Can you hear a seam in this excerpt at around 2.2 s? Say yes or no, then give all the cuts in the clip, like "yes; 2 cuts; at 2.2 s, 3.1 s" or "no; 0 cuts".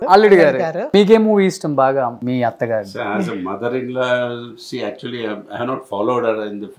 yes; 2 cuts; at 0.8 s, 2.2 s